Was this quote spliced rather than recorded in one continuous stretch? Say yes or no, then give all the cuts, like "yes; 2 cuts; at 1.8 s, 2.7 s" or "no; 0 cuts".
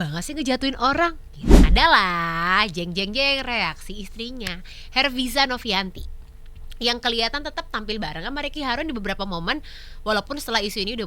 yes; 1 cut; at 1.6 s